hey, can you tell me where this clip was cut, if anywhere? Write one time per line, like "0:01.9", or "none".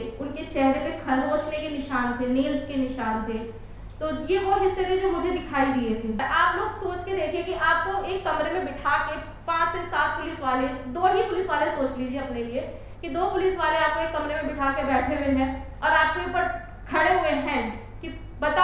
0:06.2